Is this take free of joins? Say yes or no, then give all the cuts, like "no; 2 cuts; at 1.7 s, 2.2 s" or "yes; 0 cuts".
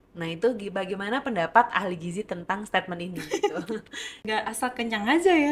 no; 1 cut; at 4.2 s